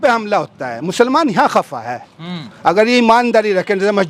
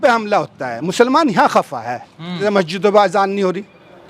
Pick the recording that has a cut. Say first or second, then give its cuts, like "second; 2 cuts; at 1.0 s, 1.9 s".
second; 1 cut; at 2.4 s